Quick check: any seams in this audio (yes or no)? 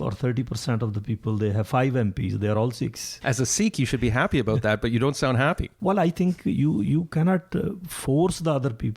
yes